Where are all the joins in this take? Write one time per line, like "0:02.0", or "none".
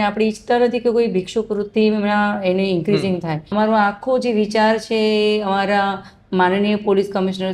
0:03.5